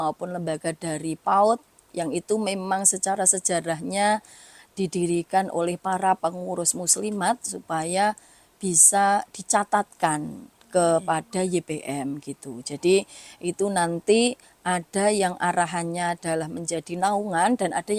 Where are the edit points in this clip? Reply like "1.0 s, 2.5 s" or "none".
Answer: none